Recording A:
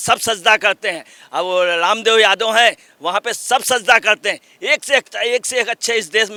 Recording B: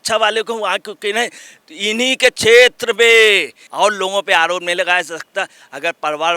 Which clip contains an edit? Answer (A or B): B